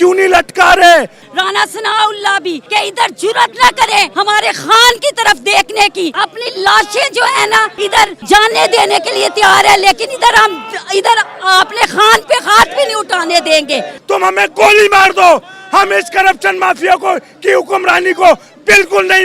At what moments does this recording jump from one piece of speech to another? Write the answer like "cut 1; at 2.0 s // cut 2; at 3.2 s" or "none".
cut 1; at 1.2 s // cut 2; at 2.6 s // cut 3; at 4.1 s // cut 4; at 6.1 s // cut 5; at 7.9 s // cut 6; at 13.9 s